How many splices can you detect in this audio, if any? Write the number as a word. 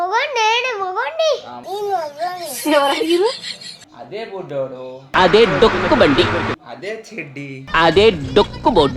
one